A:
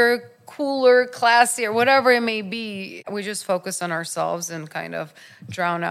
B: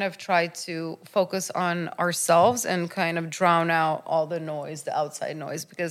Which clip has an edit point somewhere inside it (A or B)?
A